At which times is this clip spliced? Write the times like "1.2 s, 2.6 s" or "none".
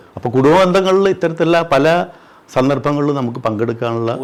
none